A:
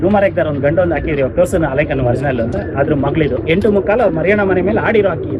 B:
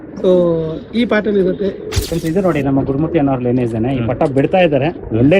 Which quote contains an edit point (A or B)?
B